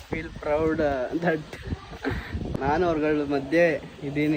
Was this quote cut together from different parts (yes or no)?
yes